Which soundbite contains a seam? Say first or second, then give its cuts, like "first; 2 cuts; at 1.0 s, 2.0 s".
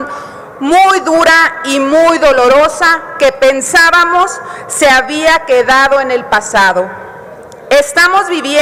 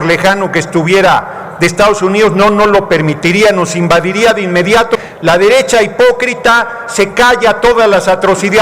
second; 1 cut; at 5.0 s